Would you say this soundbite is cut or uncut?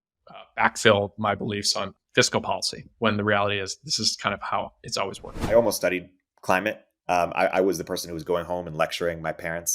cut